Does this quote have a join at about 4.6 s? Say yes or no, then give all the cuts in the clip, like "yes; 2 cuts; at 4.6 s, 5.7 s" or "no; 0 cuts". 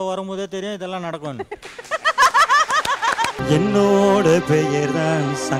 no; 1 cut; at 3.4 s